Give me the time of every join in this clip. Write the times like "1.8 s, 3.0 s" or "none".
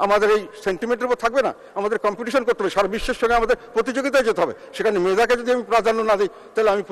none